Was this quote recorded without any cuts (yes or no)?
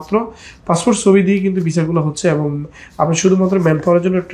yes